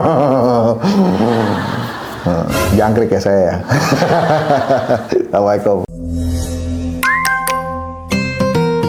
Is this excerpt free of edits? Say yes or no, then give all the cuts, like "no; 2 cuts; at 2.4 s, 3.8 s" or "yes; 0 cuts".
yes; 0 cuts